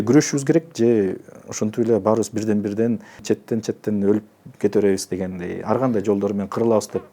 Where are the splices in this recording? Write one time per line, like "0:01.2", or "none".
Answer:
0:03.2